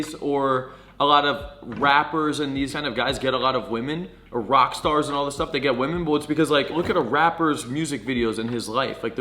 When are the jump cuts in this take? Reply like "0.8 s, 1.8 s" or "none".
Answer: 2.8 s, 6.7 s